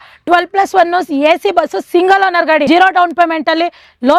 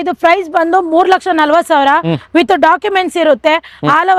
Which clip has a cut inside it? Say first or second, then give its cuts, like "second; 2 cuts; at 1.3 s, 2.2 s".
first; 1 cut; at 2.7 s